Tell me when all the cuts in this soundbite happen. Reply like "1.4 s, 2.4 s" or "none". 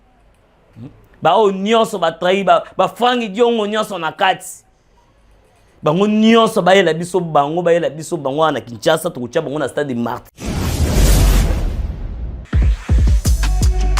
10.2 s